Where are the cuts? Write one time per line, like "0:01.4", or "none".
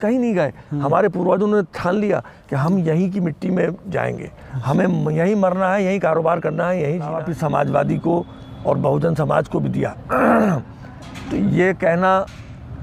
0:07.2